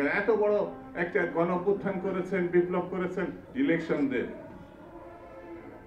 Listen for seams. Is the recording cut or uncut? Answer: cut